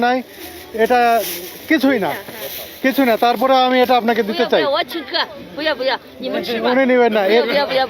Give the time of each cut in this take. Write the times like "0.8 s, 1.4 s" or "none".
none